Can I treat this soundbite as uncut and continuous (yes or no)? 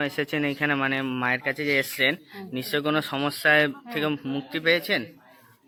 yes